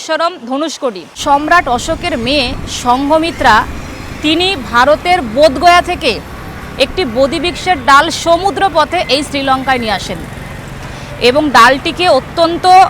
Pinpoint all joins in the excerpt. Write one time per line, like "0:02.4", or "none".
0:01.1